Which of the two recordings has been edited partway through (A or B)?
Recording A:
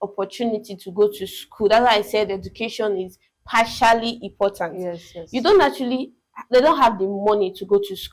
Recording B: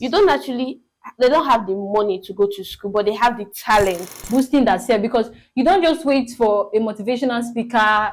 B